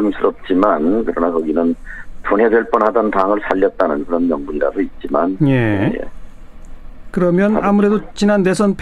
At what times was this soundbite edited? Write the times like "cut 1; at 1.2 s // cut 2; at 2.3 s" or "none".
cut 1; at 1.8 s